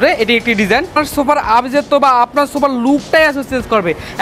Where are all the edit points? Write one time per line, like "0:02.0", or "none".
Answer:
0:01.1